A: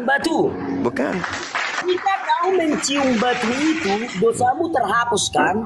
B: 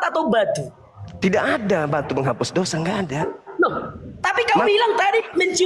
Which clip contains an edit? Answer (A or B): A